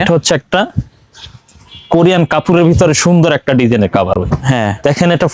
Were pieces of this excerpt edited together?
no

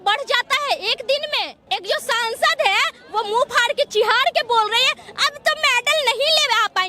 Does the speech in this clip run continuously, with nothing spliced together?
no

